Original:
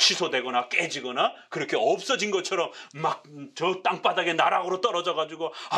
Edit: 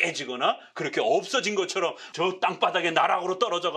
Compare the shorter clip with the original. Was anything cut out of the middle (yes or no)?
yes